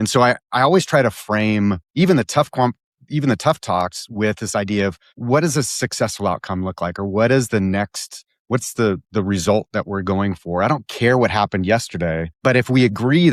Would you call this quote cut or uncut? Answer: uncut